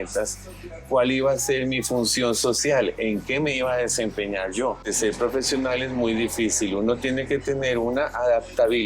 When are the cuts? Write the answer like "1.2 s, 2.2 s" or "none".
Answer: 4.9 s